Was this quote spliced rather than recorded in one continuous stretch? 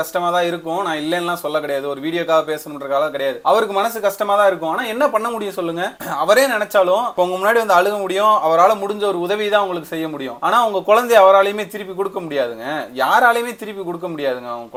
no; 0 cuts

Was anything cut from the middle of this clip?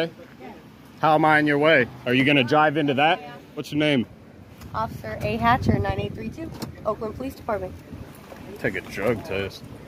yes; 1 cut; at 3.7 s

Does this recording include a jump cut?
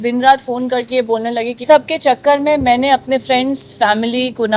yes; 1 cut; at 1.6 s

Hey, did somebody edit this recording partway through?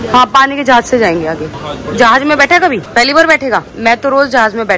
no; 0 cuts

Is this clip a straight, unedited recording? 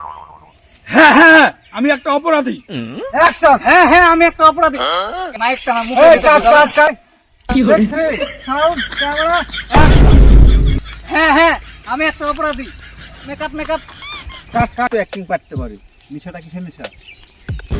no; 1 cut; at 14.9 s

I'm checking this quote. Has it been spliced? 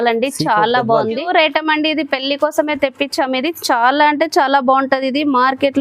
yes; 1 cut; at 1.3 s

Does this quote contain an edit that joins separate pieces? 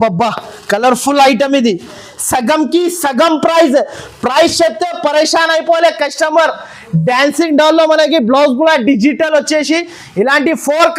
no; 0 cuts

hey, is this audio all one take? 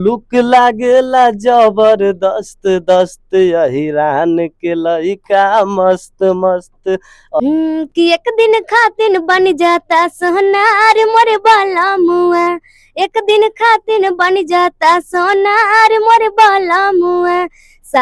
no; 1 cut; at 7.4 s

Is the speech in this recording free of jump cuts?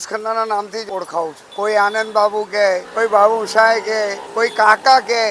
no; 3 cuts; at 0.9 s, 2.9 s, 4.2 s

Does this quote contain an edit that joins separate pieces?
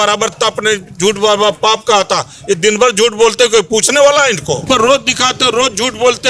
yes; 1 cut; at 4.7 s

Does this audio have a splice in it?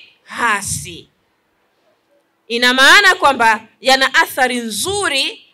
no; 0 cuts

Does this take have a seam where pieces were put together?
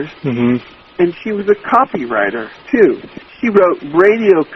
yes; 1 cut; at 3.1 s

